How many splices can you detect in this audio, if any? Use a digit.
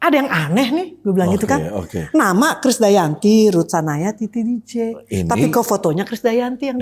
0